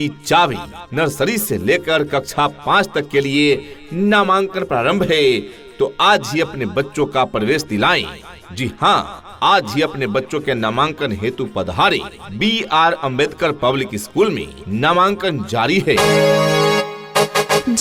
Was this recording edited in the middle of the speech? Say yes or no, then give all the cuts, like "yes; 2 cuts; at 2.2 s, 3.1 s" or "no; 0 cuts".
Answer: no; 0 cuts